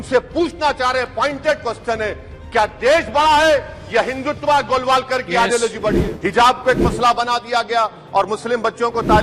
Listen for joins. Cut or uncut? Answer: cut